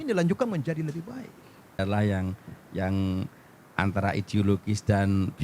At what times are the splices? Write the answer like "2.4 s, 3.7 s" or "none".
1.8 s